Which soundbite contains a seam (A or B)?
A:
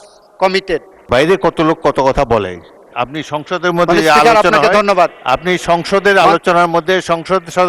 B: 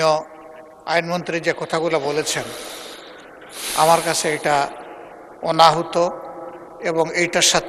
A